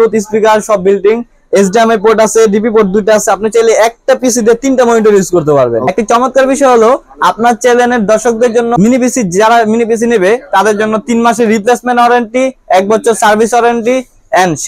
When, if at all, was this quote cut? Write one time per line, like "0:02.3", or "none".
0:05.9
0:08.7